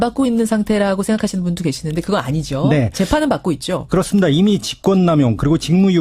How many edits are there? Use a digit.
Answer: 1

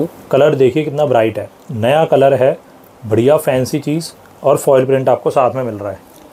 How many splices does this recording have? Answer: 0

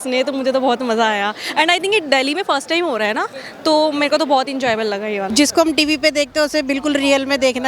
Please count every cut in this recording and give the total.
1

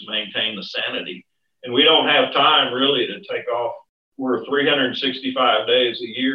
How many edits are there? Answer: 1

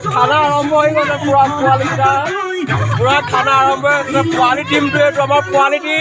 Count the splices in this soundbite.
0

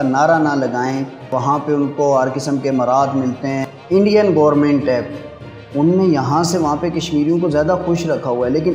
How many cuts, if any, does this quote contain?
2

